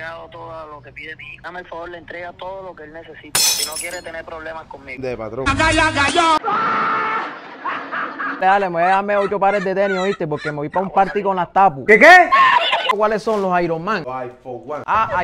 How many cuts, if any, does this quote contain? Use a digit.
4